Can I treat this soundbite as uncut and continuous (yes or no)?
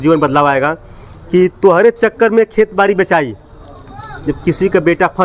yes